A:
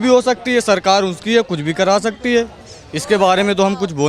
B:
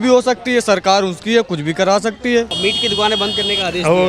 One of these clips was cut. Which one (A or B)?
B